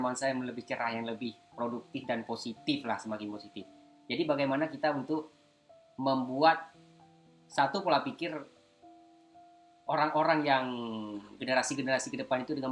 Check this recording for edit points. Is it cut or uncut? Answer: cut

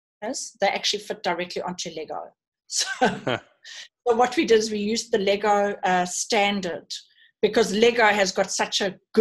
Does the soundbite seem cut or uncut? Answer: uncut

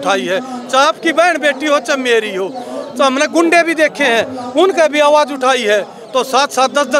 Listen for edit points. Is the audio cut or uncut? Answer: uncut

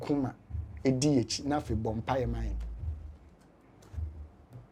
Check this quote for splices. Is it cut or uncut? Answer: uncut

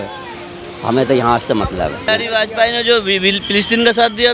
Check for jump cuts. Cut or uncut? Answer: cut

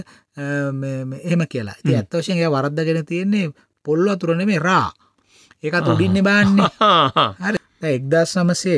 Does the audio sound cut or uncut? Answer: cut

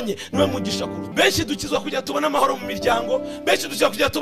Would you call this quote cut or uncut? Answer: cut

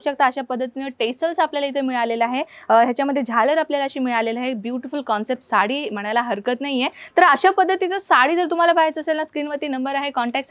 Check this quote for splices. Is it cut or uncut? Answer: uncut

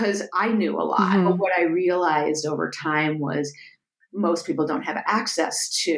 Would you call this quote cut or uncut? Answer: cut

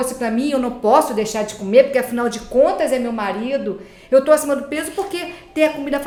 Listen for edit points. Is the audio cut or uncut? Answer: uncut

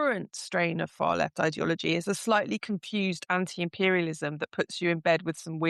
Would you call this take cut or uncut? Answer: uncut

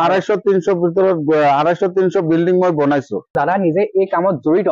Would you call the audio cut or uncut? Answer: cut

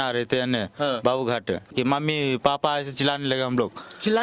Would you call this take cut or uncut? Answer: cut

